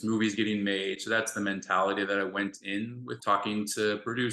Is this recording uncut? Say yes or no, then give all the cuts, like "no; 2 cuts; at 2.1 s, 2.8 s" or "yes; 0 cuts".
no; 1 cut; at 3.2 s